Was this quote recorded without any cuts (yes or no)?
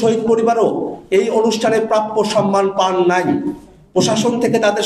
yes